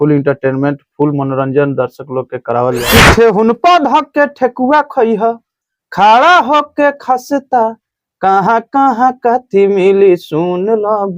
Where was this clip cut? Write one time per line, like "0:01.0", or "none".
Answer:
0:02.9